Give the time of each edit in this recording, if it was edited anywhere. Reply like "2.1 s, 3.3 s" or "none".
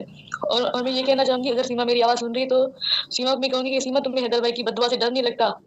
none